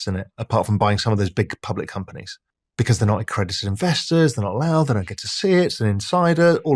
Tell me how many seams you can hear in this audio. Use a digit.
0